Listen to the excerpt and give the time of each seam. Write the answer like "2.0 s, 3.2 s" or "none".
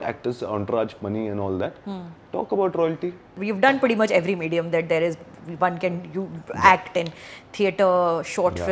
none